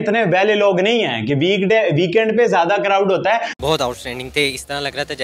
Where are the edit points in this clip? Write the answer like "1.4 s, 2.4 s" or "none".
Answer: 3.5 s